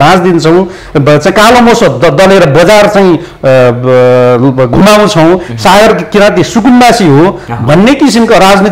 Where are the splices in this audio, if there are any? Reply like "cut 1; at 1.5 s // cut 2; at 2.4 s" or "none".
none